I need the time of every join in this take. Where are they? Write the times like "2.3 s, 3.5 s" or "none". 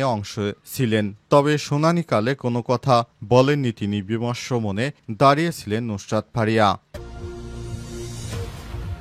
6.9 s